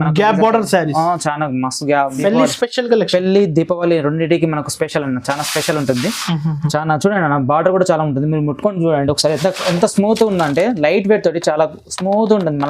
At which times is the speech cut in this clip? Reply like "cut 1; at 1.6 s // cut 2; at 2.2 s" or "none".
cut 1; at 2.1 s